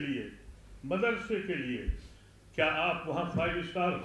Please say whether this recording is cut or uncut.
uncut